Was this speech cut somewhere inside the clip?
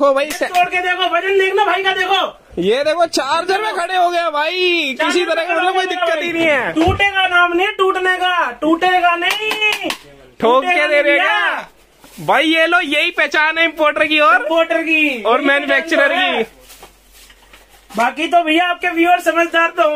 no; 0 cuts

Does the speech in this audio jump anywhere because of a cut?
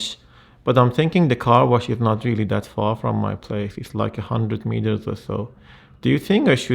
no; 0 cuts

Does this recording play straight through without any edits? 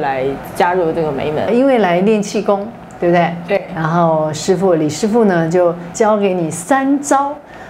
no; 1 cut; at 1.5 s

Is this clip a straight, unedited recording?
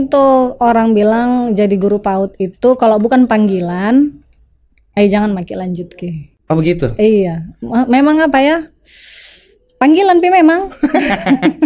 yes; 0 cuts

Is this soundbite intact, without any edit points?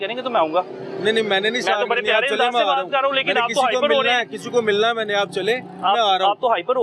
yes; 0 cuts

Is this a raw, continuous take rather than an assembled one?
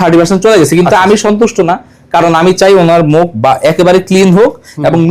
yes; 0 cuts

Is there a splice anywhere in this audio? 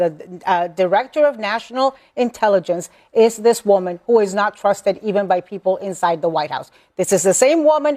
no; 0 cuts

